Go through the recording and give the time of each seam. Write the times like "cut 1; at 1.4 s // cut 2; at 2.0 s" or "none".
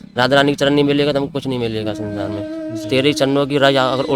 cut 1; at 2.6 s